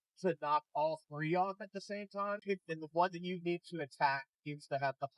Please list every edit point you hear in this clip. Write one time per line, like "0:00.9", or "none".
0:02.4